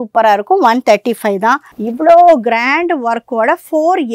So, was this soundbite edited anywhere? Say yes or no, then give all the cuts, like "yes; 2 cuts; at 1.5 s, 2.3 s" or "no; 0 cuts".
yes; 1 cut; at 1.7 s